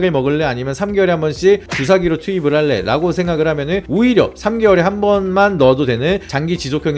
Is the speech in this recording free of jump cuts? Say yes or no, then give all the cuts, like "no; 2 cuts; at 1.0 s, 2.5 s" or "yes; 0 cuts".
yes; 0 cuts